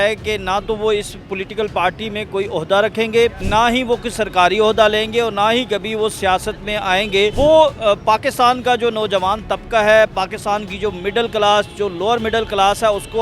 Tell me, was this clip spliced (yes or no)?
yes